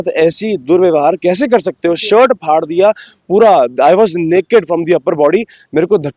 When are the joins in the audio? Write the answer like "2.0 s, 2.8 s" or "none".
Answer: none